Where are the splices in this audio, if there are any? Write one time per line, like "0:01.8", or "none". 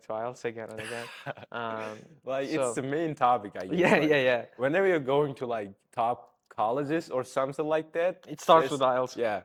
none